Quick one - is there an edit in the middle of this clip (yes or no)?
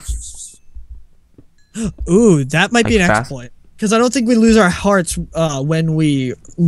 no